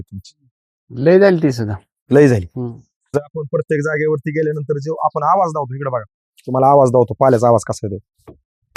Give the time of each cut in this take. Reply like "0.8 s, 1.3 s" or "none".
3.0 s